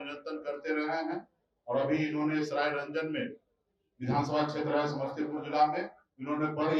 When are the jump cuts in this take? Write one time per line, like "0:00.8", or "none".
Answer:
none